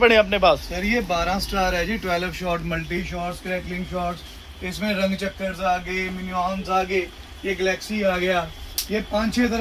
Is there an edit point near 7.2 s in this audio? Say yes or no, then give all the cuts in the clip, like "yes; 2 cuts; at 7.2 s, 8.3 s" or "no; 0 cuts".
no; 0 cuts